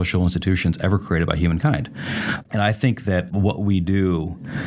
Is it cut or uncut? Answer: cut